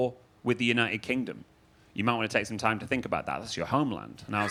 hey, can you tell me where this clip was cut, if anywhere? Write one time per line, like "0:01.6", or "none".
none